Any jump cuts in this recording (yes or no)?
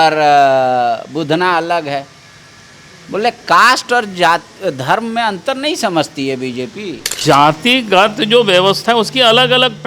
yes